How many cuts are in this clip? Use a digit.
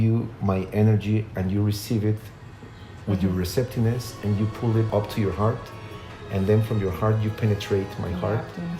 1